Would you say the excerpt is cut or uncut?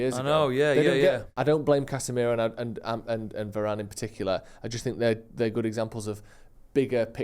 cut